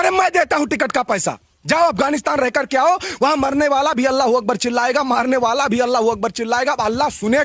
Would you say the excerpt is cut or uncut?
uncut